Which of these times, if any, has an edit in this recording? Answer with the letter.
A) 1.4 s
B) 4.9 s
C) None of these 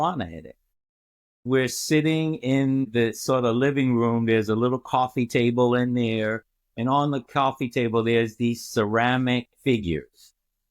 A